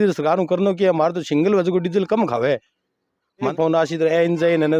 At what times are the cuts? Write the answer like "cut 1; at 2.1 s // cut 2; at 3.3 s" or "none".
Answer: cut 1; at 3.5 s